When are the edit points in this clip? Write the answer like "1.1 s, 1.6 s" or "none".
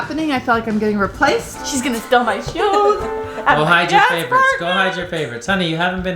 1.6 s